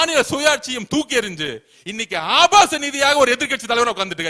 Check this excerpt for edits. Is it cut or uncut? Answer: uncut